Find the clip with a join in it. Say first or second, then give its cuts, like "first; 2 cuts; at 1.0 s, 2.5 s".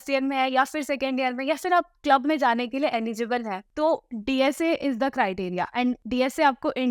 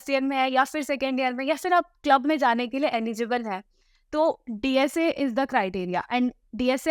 first; 2 cuts; at 3.6 s, 6.0 s